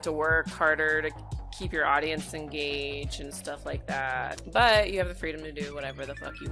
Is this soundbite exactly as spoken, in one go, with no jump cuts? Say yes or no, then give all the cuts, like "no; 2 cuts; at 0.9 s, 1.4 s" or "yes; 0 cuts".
no; 1 cut; at 4.4 s